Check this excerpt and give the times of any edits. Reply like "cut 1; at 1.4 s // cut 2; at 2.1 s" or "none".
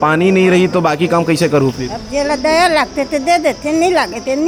none